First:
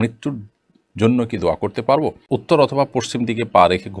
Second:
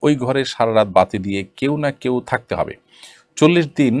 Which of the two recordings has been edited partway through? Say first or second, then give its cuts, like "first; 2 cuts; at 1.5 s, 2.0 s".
first; 1 cut; at 2.4 s